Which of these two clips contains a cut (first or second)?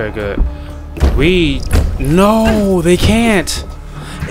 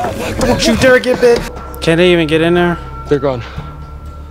second